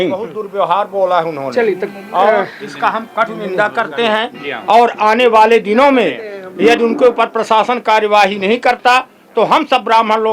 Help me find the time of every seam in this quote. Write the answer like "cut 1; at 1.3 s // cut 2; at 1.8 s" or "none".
none